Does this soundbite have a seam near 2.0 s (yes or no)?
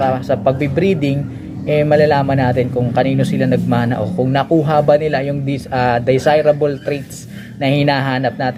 no